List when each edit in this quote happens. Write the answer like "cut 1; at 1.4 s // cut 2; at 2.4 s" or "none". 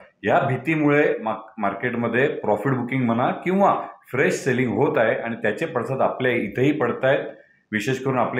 none